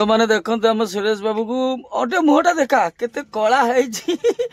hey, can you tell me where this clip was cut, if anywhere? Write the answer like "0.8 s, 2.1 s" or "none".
none